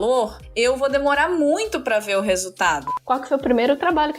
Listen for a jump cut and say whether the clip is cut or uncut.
cut